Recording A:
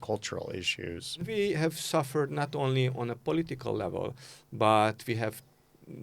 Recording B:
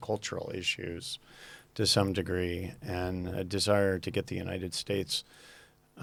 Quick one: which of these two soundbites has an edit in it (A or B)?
A